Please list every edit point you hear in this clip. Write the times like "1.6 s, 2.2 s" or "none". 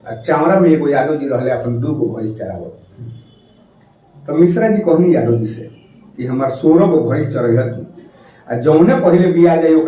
none